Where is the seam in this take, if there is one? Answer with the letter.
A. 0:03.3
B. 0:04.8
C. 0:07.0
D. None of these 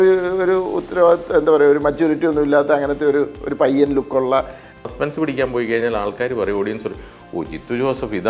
B